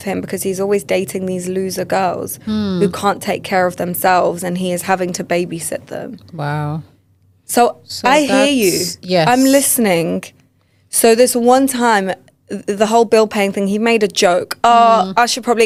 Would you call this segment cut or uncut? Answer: uncut